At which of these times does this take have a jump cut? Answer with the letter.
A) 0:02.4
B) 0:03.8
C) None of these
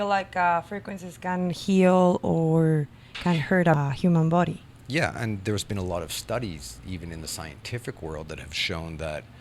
B